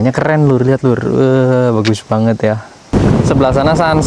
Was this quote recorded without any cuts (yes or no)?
no